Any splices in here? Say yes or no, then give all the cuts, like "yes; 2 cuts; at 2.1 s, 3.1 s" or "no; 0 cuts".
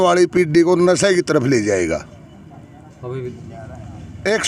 yes; 1 cut; at 3.3 s